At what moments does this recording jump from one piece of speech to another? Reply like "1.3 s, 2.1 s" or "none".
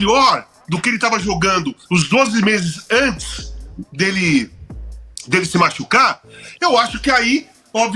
none